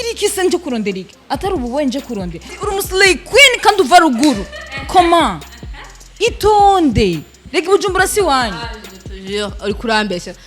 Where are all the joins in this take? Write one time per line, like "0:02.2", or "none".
0:02.4

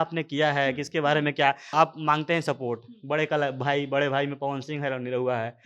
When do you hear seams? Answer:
0:01.7

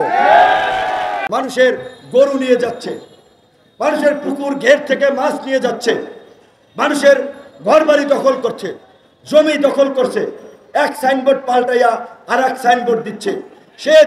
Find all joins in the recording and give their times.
0:01.2

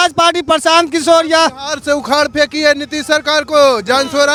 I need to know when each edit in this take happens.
none

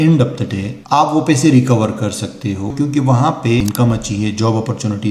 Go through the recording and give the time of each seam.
0:02.7
0:03.6

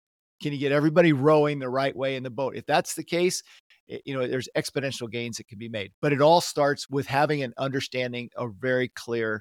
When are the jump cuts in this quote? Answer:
0:06.8

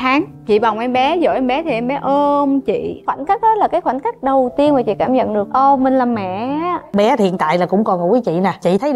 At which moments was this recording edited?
0:03.0
0:05.5
0:06.9

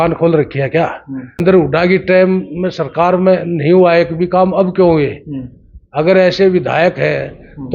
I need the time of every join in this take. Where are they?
0:01.4

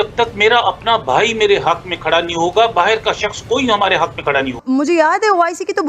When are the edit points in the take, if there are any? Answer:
0:04.6

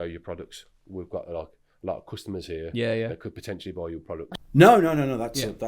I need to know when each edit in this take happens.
0:04.4

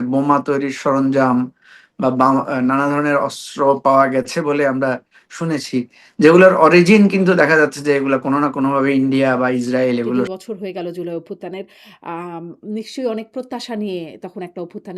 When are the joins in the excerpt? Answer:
0:10.3

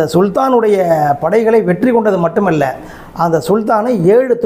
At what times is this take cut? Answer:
none

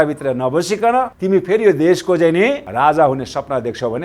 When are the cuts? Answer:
0:01.2
0:02.7

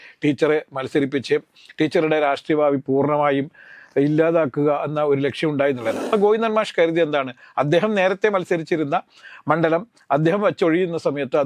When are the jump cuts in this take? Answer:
0:06.0

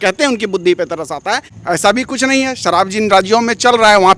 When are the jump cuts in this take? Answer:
0:01.5

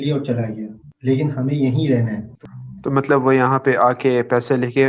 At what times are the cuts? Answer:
0:02.3

